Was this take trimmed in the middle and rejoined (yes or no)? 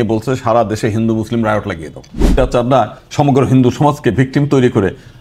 yes